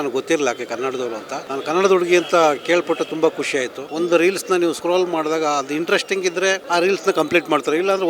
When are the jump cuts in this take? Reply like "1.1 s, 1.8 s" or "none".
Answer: 1.4 s, 3.8 s, 4.8 s, 6.6 s